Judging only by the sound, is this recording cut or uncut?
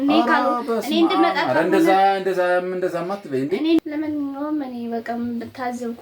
cut